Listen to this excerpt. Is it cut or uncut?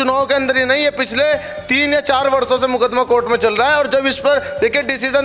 uncut